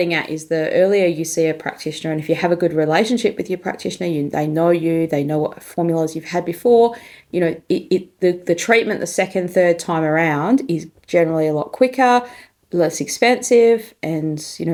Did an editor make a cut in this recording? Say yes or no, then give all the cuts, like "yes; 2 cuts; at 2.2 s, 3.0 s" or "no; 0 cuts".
no; 0 cuts